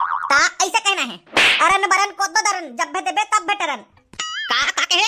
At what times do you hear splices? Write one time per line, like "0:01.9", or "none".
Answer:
none